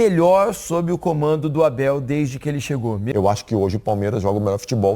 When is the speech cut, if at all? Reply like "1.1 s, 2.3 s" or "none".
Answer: 3.0 s